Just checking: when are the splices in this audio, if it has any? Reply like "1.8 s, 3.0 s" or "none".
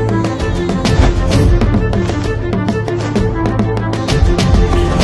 none